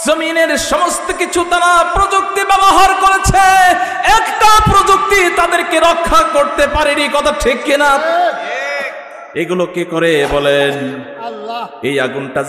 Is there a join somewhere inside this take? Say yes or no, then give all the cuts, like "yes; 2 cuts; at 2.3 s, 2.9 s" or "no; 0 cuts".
no; 0 cuts